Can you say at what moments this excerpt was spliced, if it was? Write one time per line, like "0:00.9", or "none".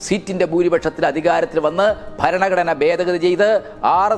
none